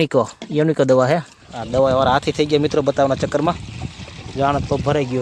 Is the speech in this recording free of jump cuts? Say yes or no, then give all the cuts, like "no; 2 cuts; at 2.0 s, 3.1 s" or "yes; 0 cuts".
yes; 0 cuts